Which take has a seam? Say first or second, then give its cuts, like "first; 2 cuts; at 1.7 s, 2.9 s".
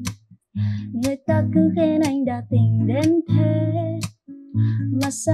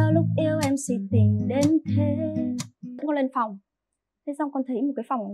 second; 1 cut; at 3.0 s